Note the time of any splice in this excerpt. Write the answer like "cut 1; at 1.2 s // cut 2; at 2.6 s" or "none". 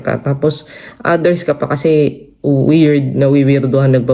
none